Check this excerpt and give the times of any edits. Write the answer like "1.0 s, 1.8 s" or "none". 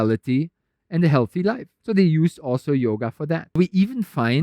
1.7 s, 3.6 s